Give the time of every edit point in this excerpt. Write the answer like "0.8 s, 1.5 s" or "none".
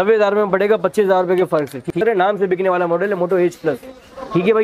1.9 s